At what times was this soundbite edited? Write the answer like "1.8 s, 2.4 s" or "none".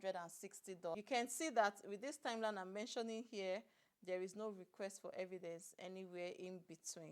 0.9 s